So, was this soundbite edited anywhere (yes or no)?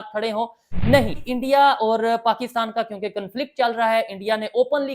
yes